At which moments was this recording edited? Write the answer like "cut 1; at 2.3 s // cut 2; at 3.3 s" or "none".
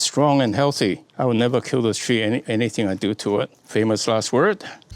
cut 1; at 1.1 s // cut 2; at 3.6 s